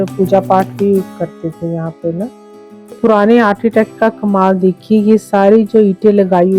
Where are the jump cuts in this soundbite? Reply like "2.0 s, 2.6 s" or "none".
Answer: 2.9 s